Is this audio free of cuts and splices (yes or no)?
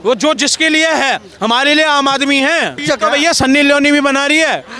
no